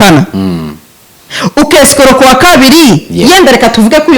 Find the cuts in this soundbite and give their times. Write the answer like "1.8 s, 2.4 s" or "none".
none